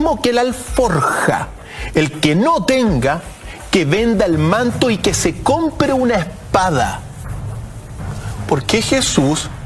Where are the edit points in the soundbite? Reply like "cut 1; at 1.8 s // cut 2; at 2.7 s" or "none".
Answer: none

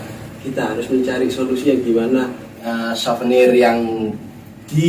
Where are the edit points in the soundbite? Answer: cut 1; at 2.6 s

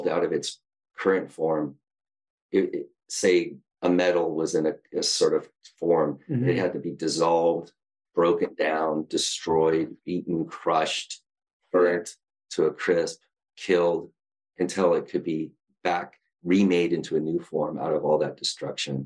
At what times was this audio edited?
cut 1; at 2.0 s

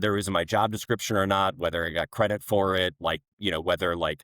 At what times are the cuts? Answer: cut 1; at 3.3 s

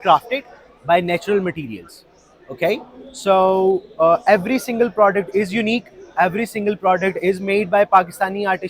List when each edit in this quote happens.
none

